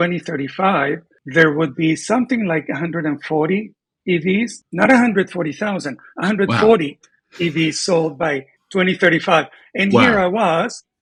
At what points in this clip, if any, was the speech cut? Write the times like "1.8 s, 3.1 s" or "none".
none